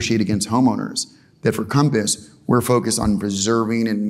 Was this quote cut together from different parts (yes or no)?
no